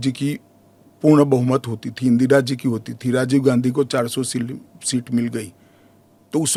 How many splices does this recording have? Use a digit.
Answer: 0